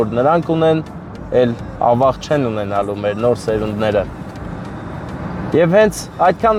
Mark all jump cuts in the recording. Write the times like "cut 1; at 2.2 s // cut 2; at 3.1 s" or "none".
none